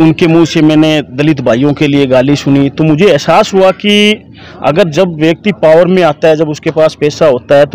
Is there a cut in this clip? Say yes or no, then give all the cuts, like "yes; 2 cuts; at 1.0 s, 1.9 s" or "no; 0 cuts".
no; 0 cuts